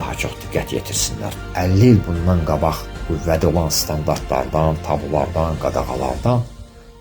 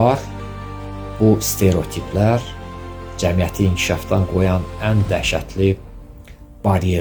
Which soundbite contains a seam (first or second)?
first